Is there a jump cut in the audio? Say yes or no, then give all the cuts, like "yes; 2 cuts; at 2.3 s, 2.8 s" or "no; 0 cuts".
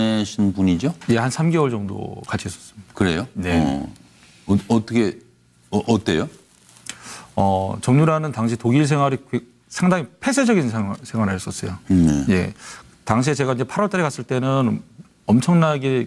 no; 0 cuts